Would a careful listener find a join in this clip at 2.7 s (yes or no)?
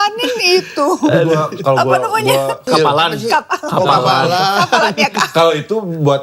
yes